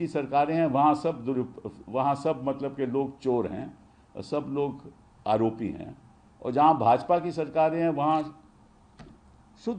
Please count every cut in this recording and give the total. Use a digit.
0